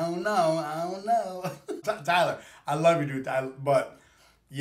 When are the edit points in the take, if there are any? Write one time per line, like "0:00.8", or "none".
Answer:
0:01.8